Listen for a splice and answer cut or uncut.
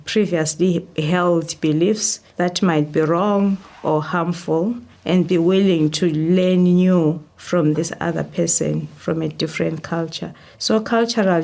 uncut